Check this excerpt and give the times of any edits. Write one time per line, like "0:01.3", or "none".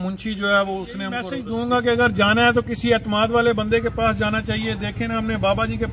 0:01.4